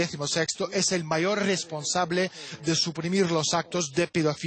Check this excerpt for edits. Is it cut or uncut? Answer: cut